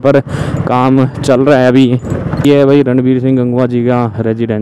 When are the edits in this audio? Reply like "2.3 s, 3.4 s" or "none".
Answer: 2.4 s